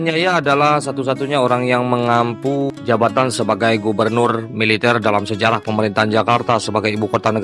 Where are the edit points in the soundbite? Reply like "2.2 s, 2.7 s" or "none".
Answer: 2.8 s